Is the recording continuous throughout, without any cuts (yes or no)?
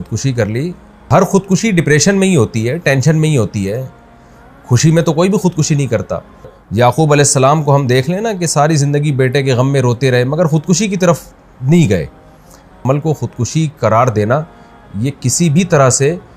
no